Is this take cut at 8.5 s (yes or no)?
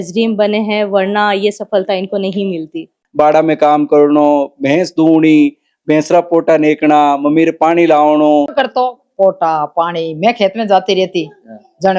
yes